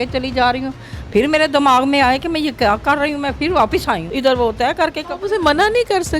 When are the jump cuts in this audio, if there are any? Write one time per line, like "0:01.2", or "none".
0:04.1